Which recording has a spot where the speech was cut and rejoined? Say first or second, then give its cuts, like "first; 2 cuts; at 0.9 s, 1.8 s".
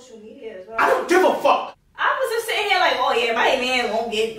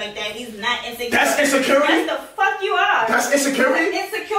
first; 1 cut; at 1.7 s